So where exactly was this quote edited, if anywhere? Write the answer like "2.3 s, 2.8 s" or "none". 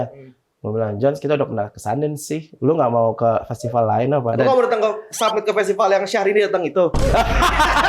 4.3 s

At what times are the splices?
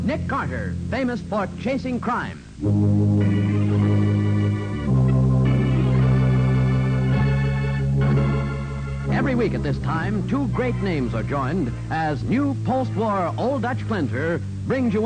11.8 s

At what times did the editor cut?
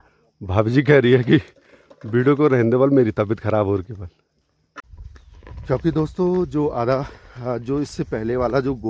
4.8 s

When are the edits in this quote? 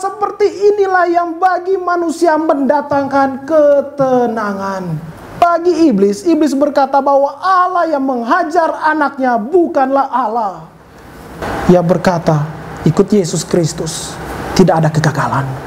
5.4 s, 11.4 s

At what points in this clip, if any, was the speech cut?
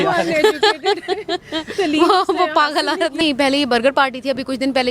3.2 s

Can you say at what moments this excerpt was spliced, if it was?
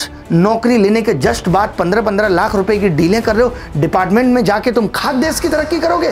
none

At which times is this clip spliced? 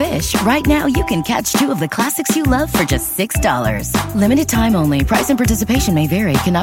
none

